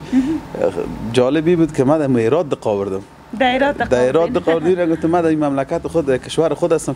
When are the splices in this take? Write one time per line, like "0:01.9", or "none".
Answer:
none